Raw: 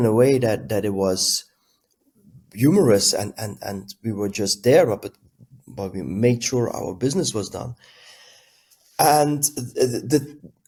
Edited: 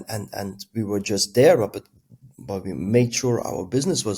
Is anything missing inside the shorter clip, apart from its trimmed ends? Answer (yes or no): no